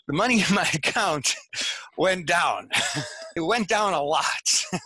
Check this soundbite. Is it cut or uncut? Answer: cut